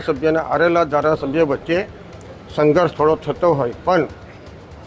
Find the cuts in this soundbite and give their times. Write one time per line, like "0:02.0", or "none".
none